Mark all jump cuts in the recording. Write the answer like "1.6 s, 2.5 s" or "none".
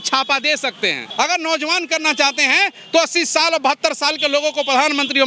1.0 s